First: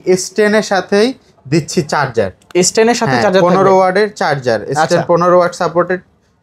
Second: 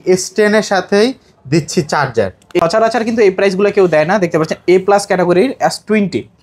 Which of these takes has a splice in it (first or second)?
second